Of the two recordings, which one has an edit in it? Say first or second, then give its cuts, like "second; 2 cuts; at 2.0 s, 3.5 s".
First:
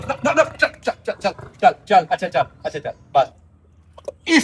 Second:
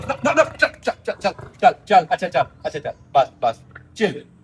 first; 1 cut; at 3.3 s